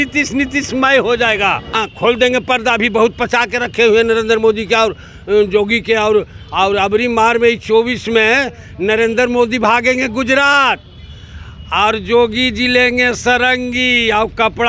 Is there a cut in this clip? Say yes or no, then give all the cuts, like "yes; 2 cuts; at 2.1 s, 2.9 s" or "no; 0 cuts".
yes; 1 cut; at 1.7 s